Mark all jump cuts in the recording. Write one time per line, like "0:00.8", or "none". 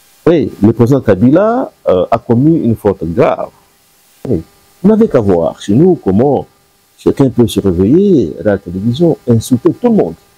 0:04.3